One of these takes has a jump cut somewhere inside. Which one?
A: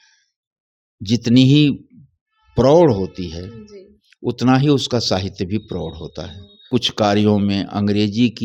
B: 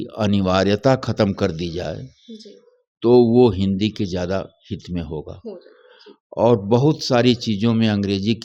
A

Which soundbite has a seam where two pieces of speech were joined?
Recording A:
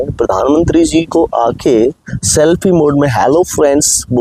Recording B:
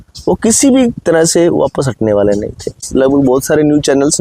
B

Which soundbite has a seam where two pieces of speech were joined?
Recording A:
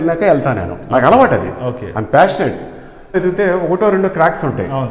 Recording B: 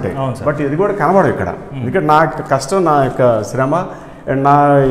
A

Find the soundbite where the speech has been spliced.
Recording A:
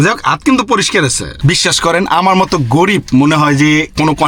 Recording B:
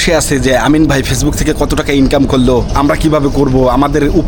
A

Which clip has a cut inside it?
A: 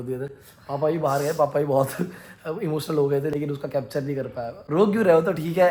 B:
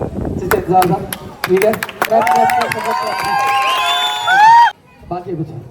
B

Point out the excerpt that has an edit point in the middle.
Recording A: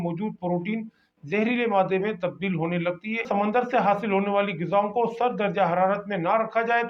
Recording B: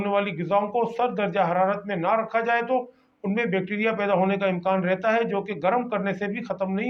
A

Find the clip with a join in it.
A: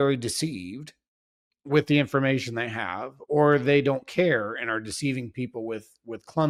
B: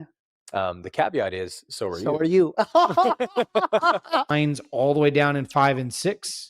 B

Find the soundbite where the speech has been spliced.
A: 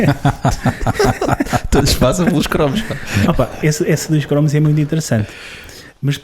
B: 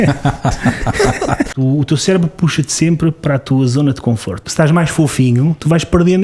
B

